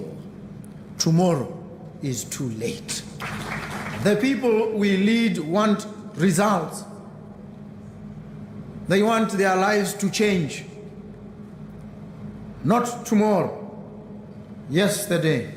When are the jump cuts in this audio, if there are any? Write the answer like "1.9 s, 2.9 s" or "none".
3.2 s